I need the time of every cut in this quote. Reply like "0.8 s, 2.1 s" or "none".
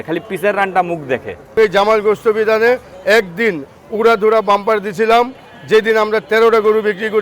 1.6 s